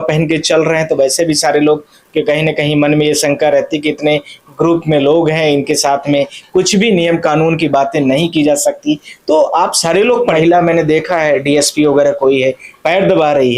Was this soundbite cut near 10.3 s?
yes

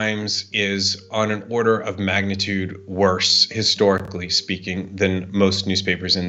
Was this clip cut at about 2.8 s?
no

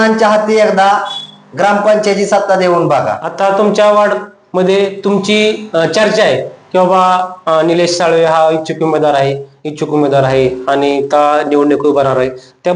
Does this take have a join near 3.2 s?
yes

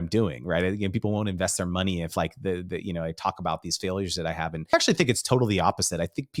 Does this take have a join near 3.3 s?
no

